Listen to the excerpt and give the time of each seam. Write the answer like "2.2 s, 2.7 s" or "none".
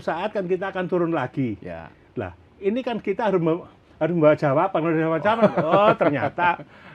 none